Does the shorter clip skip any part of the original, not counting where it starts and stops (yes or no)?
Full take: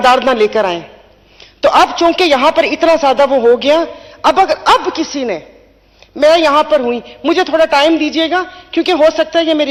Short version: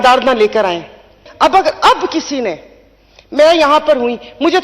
yes